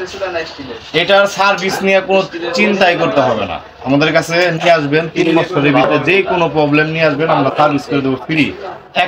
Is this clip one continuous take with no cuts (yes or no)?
yes